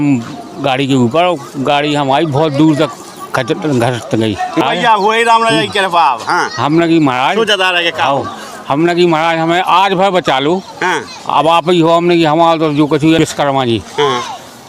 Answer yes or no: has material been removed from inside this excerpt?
yes